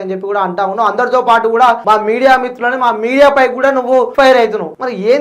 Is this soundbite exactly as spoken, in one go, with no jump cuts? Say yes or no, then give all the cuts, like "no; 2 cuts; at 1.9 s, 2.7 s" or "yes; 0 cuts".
no; 2 cuts; at 1.8 s, 4.3 s